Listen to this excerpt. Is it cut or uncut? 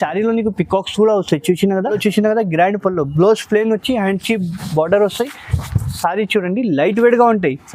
cut